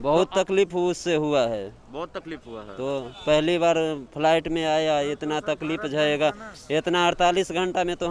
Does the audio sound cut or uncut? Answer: uncut